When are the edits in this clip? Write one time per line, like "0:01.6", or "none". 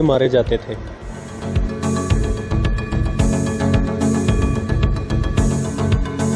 none